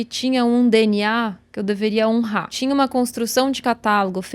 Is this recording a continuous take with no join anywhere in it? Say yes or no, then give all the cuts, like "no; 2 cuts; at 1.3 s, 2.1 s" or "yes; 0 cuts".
no; 1 cut; at 2.5 s